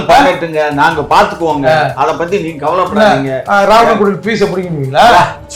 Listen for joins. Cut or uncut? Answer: uncut